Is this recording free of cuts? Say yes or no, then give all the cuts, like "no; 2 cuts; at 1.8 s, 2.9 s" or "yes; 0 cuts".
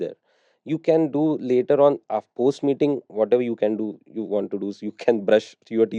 yes; 0 cuts